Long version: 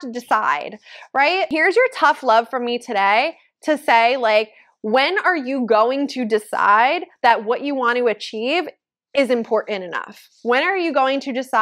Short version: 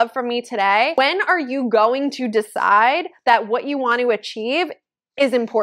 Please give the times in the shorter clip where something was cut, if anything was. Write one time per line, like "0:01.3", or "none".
0:00.9